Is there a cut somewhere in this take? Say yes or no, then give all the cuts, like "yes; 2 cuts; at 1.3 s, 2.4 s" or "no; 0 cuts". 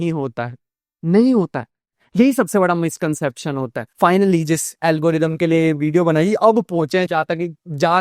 yes; 1 cut; at 3.8 s